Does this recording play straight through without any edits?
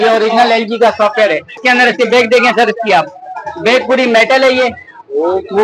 no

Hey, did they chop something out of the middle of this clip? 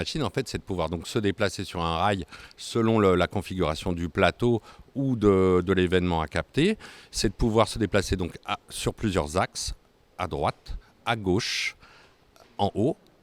no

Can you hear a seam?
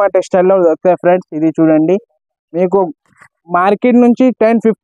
no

